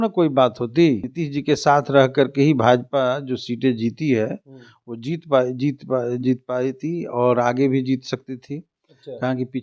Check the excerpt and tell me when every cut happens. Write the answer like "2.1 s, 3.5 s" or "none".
1.2 s